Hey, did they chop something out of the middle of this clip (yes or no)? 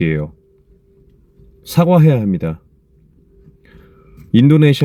no